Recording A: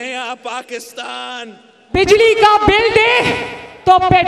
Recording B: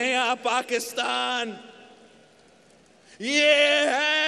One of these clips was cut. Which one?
A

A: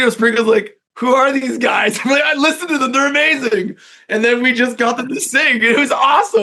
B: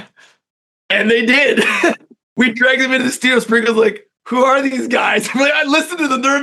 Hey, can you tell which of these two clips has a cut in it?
B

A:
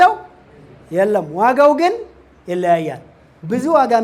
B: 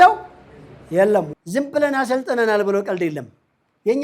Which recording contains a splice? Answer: B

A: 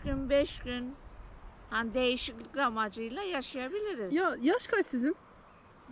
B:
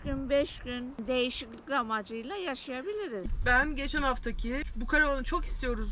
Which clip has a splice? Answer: B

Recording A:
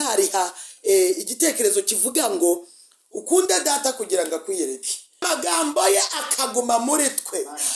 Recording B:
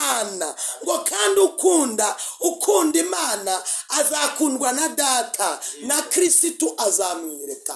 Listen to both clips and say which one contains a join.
A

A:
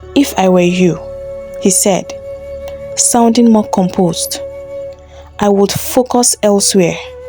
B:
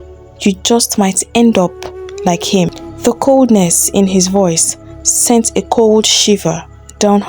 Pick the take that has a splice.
B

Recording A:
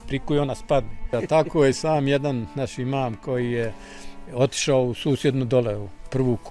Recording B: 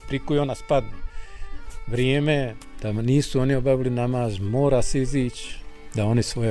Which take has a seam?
A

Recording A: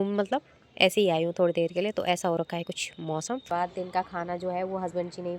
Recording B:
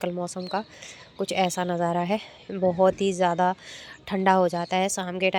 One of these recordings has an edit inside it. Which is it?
A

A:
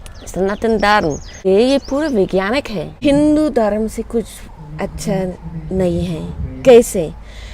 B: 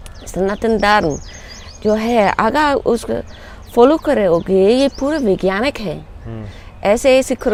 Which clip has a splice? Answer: A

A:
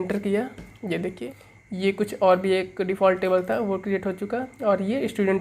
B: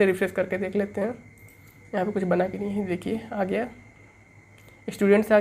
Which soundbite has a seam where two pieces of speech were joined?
A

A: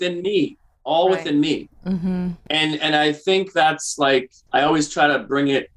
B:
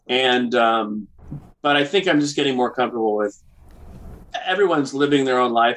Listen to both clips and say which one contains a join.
A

